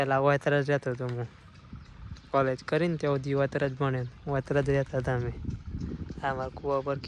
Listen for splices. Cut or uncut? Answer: uncut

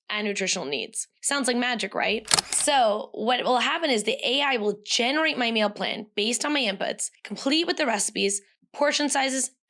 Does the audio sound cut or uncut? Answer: cut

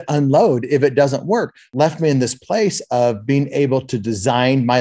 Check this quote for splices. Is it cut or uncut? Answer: cut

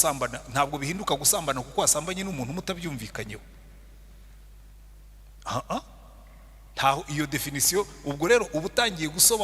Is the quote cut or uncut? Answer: uncut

